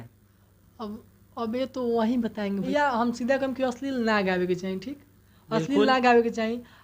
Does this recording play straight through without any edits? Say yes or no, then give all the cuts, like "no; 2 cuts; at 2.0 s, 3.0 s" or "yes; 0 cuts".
no; 1 cut; at 2.5 s